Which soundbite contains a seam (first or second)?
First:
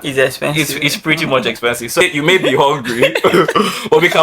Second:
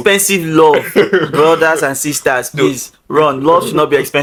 first